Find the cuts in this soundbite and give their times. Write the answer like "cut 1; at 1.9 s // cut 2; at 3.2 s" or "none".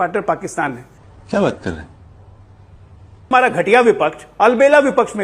cut 1; at 3.3 s